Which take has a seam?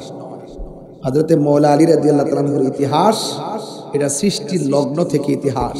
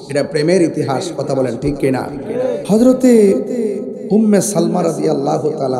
second; 1 cut; at 2.6 s

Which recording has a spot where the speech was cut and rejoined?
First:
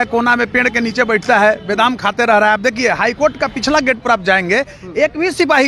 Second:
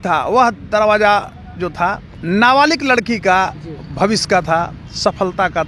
second; 1 cut; at 2.1 s

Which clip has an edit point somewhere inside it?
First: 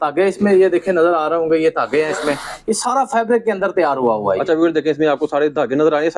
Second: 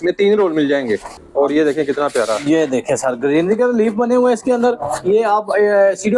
second; 1 cut; at 1.1 s

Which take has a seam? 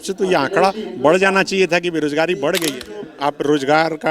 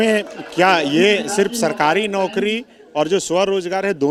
first; 1 cut; at 2.8 s

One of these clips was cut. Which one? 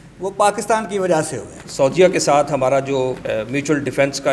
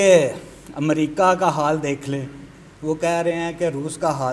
first; 2 cuts; at 1.6 s, 3.2 s

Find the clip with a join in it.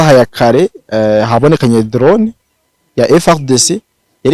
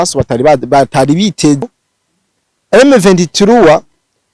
second; 1 cut; at 1.7 s

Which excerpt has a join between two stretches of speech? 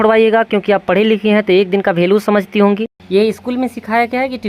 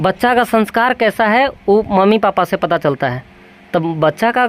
first; 1 cut; at 2.9 s

